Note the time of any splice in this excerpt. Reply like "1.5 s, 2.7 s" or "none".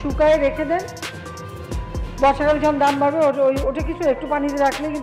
none